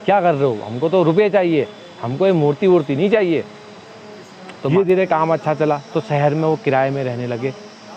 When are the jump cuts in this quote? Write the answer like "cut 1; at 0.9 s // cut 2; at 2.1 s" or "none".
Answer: cut 1; at 4.7 s